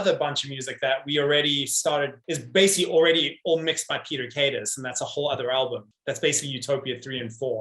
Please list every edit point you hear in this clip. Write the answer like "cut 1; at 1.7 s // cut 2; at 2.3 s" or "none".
cut 1; at 2.2 s // cut 2; at 5.9 s